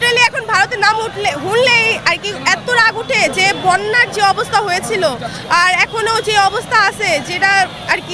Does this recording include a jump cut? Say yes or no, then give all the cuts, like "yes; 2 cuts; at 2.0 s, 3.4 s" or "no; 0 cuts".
no; 0 cuts